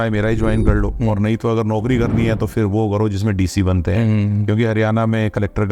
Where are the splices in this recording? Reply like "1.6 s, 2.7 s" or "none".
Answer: none